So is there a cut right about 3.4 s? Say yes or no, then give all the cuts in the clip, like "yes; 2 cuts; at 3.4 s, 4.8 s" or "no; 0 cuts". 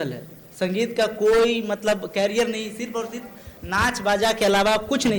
no; 0 cuts